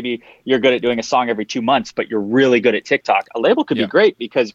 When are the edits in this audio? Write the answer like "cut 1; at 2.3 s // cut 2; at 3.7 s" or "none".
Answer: none